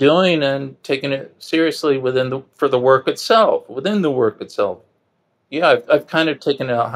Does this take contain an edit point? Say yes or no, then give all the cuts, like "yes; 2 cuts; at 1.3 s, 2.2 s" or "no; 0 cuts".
no; 0 cuts